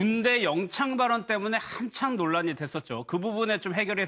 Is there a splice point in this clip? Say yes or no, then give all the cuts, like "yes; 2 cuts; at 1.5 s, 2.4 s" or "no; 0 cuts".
yes; 1 cut; at 2.7 s